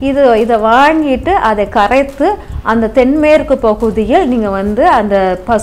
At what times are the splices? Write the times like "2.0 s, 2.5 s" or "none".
none